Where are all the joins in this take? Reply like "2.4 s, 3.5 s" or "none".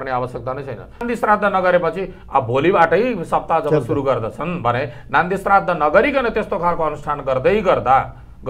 1.0 s

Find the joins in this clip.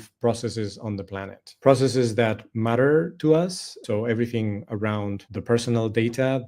3.8 s, 5.3 s

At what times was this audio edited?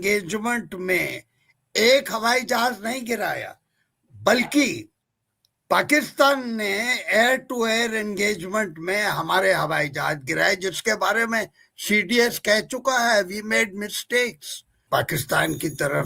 14.8 s

